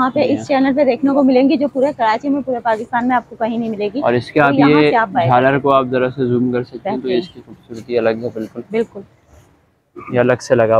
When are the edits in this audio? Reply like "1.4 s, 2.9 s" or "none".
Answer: none